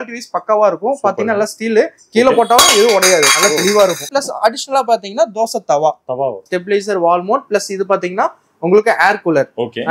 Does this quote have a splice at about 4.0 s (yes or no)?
yes